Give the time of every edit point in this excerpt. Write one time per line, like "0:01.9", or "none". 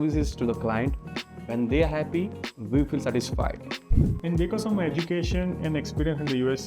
0:03.9